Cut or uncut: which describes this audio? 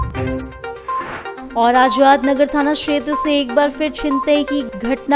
cut